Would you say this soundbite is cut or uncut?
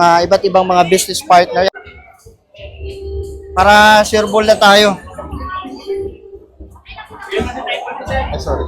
cut